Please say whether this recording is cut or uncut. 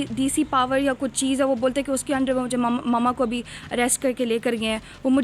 uncut